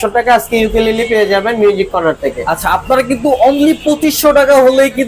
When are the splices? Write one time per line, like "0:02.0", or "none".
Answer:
none